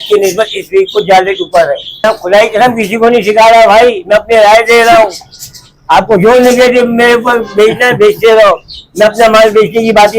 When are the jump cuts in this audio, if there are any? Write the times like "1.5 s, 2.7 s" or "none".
2.0 s